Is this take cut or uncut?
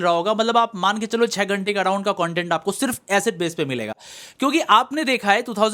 uncut